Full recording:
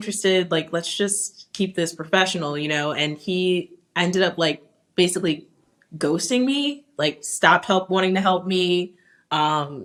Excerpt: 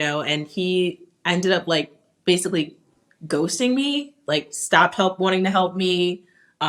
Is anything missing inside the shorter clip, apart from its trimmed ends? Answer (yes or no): no